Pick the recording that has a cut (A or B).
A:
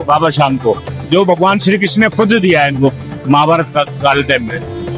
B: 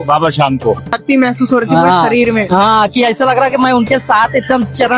B